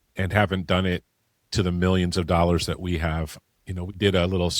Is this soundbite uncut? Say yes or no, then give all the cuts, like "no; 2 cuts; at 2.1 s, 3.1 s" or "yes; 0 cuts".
yes; 0 cuts